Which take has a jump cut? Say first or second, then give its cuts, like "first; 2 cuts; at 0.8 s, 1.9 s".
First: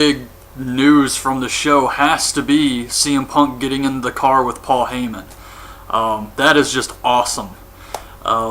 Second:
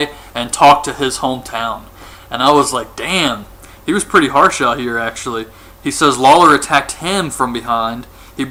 first; 1 cut; at 6.9 s